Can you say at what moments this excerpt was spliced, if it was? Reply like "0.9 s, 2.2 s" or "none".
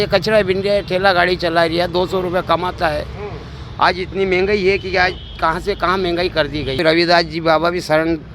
6.8 s